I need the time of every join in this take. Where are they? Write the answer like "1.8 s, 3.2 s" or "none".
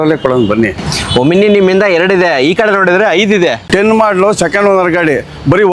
3.7 s